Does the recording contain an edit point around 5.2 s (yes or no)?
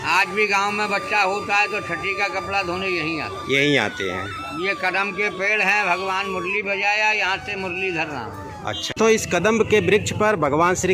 no